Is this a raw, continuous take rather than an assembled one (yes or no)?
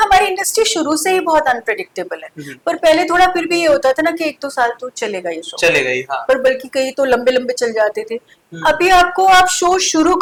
yes